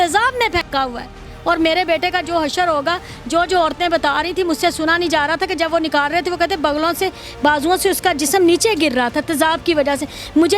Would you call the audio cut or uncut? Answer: uncut